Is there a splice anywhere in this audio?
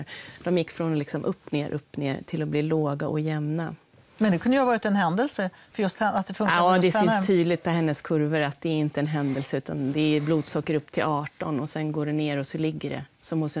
no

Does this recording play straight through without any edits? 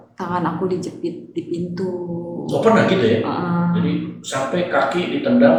yes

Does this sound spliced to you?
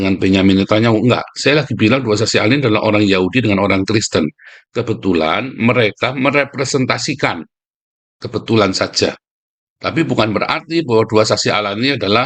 no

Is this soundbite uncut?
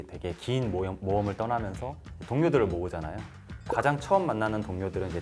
no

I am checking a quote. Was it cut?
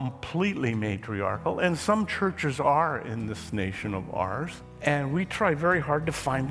yes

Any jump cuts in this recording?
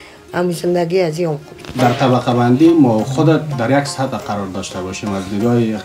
yes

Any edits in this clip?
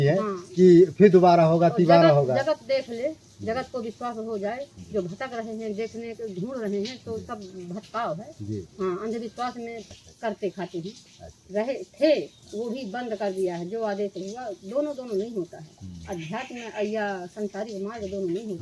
yes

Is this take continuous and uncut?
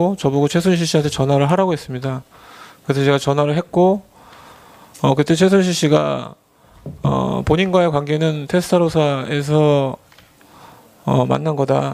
no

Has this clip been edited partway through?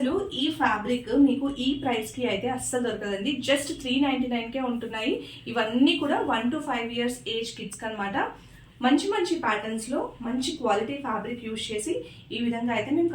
no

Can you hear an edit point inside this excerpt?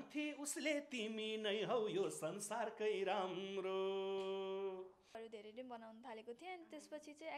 yes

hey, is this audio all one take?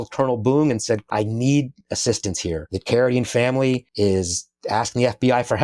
no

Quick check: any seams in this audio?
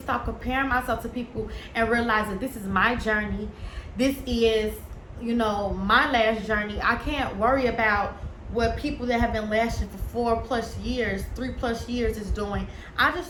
no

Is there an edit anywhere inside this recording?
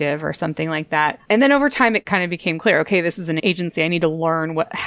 yes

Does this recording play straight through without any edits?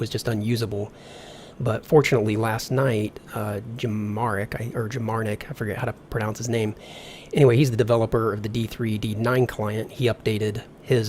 no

